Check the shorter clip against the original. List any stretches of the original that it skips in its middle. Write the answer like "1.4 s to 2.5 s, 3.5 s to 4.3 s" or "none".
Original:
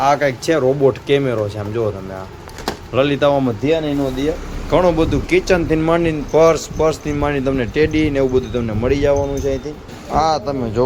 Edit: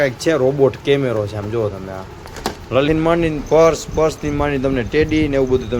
3.1 s to 5.7 s